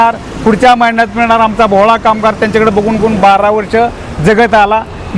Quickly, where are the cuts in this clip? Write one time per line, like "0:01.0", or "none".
none